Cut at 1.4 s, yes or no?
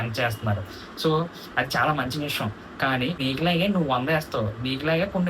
no